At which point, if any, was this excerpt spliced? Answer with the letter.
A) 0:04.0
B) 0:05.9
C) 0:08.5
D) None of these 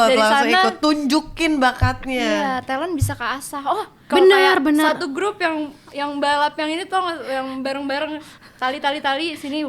A